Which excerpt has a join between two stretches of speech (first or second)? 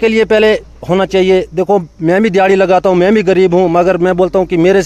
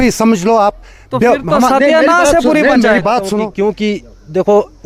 second